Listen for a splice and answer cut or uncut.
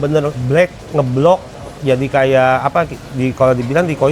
uncut